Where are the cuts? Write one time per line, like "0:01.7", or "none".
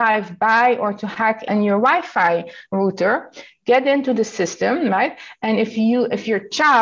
0:01.4